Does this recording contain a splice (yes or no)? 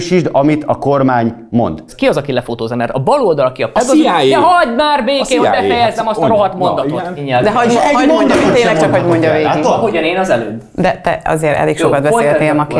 yes